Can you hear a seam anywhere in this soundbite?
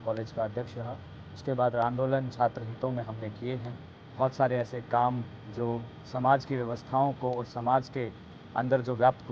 yes; 1 cut; at 1.8 s

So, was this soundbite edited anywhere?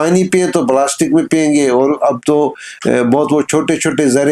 no; 0 cuts

